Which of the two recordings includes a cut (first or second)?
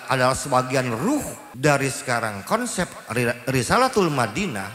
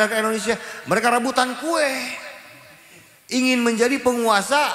first